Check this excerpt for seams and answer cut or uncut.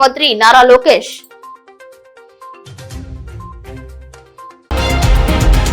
cut